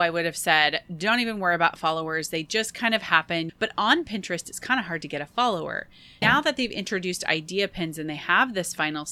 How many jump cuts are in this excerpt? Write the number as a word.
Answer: two